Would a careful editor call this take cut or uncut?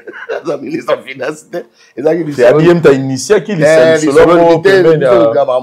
uncut